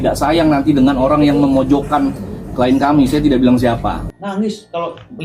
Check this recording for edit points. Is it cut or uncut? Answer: uncut